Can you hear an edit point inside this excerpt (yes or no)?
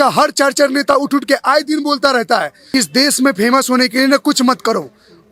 yes